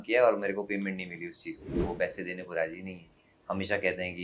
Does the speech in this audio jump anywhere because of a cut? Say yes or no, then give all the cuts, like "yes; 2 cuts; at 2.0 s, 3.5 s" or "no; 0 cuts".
yes; 1 cut; at 1.8 s